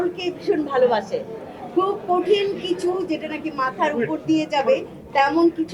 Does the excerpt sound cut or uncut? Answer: uncut